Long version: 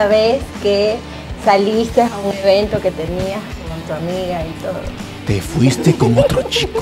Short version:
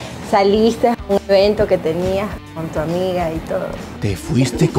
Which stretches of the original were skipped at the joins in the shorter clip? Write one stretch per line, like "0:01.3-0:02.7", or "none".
0:05.0-0:05.1